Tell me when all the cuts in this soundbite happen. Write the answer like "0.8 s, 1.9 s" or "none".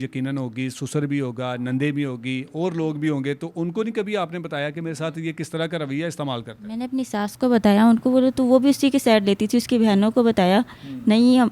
none